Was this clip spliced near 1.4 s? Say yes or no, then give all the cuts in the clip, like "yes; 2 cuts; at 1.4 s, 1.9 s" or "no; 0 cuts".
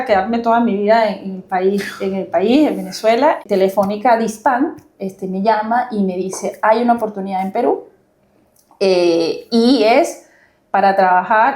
no; 1 cut; at 3.4 s